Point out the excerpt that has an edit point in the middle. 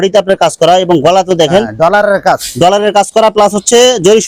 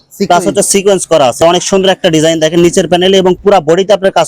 second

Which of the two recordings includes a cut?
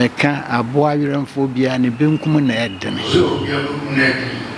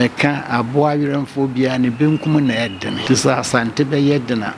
second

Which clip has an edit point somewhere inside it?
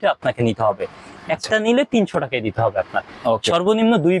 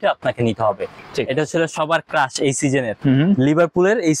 second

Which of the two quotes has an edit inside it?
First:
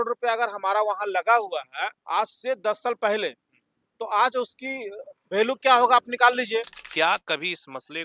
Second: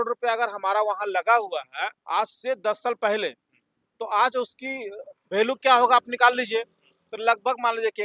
first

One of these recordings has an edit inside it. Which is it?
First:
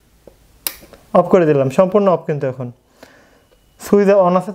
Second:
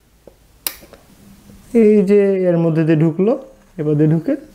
second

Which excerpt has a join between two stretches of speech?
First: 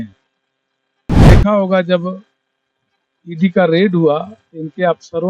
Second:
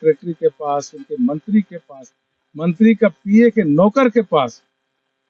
first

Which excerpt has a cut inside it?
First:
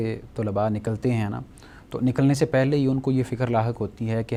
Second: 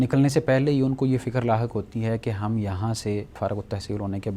second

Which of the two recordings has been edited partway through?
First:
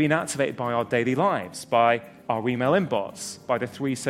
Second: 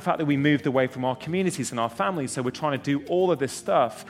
first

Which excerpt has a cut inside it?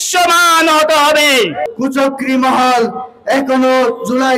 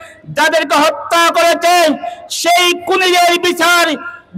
first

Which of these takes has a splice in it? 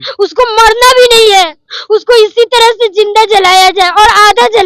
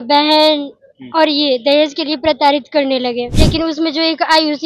second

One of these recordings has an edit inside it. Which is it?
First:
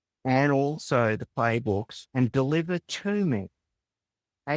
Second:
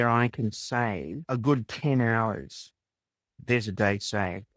second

